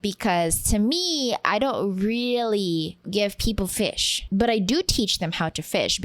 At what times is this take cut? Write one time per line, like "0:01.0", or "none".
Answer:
0:03.0
0:04.1

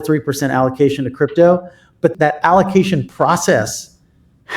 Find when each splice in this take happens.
0:02.1

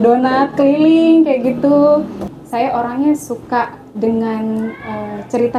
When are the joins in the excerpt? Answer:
0:02.3

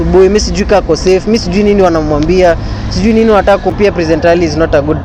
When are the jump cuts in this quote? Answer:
0:03.8

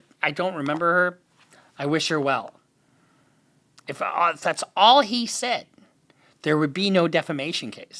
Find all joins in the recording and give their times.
none

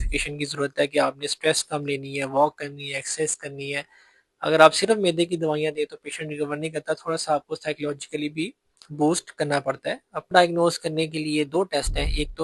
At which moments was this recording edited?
0:10.3

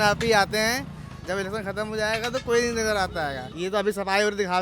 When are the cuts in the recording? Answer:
0:03.5

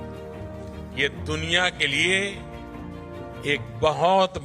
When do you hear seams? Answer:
0:00.9

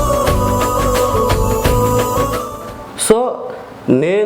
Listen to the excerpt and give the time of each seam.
0:02.6

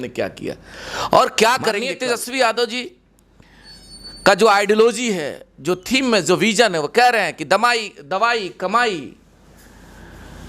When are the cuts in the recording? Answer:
0:01.9

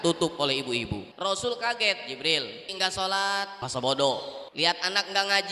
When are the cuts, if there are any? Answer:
0:01.1
0:02.7
0:03.6
0:04.4

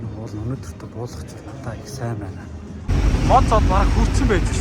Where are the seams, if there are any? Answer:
0:03.0

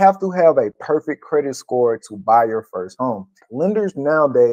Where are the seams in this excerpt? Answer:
0:03.5

